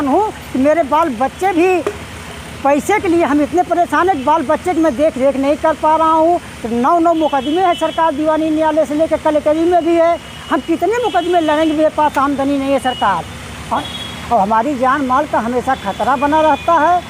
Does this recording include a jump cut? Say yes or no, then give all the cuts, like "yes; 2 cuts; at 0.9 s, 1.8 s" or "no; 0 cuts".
yes; 1 cut; at 13.8 s